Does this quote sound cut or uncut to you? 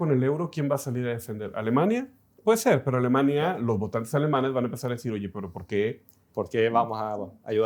uncut